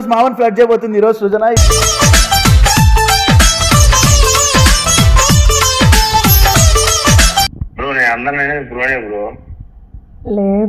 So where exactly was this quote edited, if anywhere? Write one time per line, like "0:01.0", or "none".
0:07.6